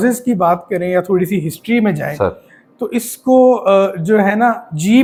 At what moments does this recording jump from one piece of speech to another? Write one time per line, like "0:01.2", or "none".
none